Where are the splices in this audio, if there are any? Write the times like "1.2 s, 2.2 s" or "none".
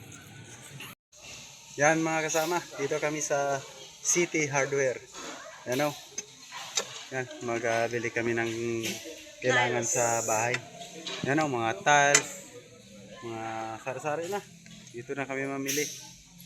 1.0 s